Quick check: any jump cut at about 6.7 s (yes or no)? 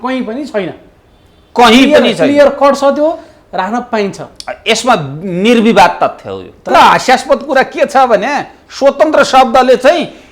yes